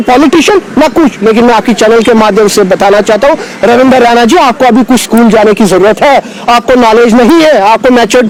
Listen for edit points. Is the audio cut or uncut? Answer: uncut